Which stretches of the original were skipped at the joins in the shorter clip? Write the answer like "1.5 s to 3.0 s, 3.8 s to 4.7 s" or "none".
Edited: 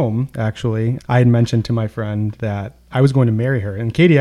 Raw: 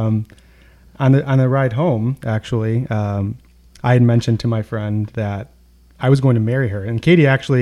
2.9 s to 3.7 s, 5.5 s to 5.8 s